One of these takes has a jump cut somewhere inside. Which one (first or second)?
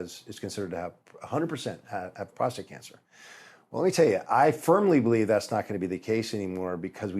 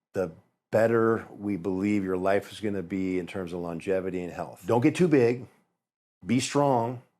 second